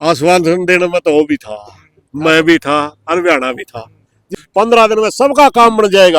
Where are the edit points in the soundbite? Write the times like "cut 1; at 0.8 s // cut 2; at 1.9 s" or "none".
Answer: cut 1; at 4.3 s